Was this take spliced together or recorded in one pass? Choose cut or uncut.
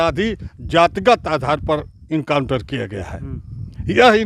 uncut